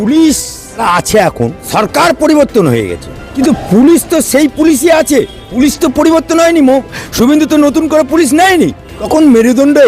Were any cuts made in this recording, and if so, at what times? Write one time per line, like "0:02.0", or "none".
0:00.8
0:01.6
0:03.3
0:05.4
0:08.9